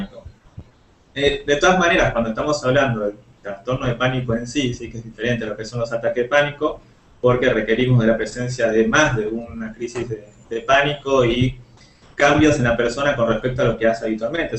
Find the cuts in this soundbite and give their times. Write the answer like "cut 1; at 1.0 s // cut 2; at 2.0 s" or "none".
none